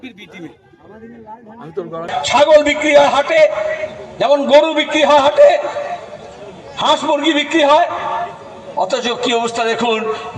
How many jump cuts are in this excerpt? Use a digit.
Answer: 1